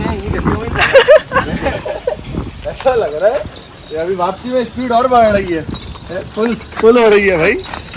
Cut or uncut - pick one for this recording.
uncut